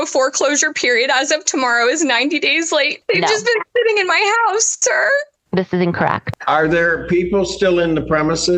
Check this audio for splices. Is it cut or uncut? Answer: cut